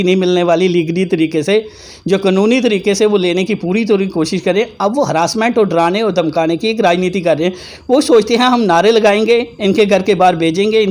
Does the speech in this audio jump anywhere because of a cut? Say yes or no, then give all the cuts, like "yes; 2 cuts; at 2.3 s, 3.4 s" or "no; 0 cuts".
no; 0 cuts